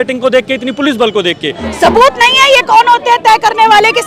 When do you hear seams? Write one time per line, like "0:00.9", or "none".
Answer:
0:01.7